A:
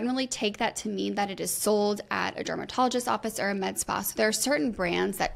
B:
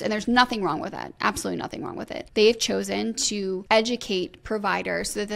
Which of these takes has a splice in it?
B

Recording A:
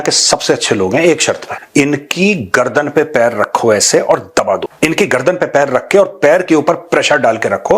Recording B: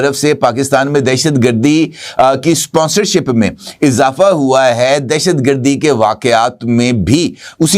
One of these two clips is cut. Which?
A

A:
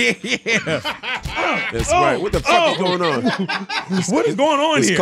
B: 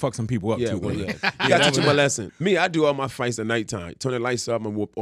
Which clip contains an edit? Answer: B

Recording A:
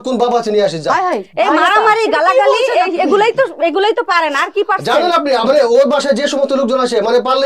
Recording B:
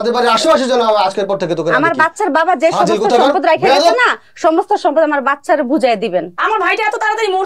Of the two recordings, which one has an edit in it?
B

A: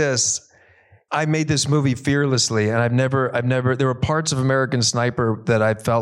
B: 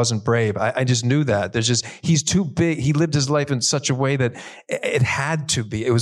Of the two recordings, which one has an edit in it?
A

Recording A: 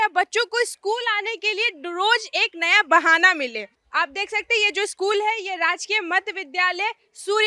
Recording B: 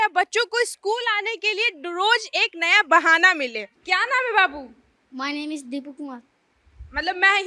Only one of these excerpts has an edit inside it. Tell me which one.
B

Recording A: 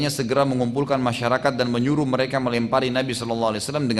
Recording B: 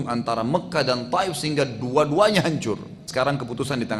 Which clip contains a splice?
B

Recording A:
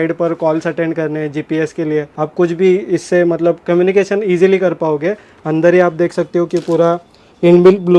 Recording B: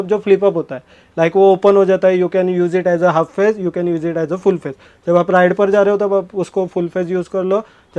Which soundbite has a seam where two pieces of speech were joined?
A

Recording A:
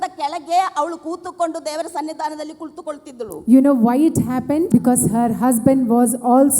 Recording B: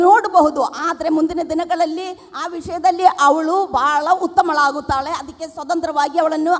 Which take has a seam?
A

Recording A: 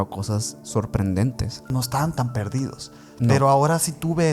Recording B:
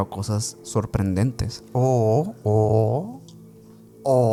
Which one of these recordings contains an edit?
A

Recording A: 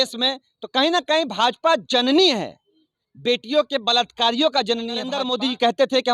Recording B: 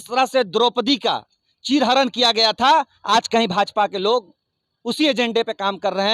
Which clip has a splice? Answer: A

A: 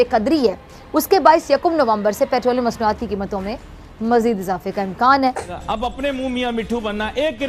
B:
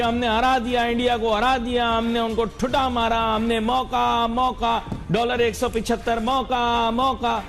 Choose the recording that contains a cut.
A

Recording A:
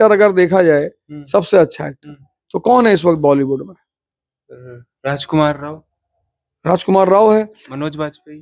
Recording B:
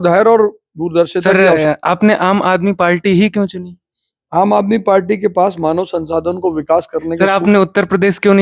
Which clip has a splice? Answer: B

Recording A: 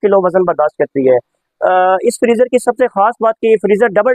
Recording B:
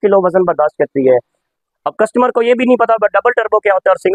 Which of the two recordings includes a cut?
B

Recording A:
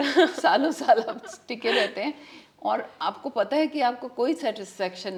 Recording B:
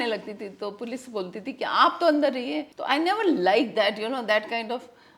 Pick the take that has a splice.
B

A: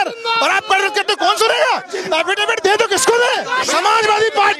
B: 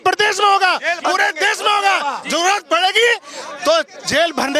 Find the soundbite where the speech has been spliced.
A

